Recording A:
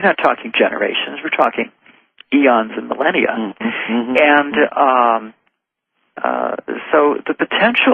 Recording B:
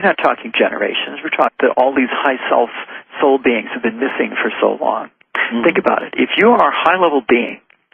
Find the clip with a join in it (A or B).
A